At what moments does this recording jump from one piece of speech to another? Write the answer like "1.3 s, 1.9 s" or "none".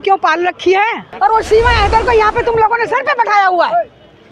1.1 s